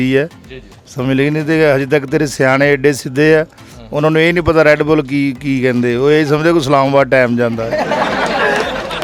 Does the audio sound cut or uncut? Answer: uncut